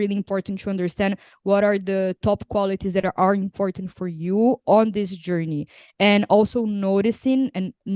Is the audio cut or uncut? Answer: uncut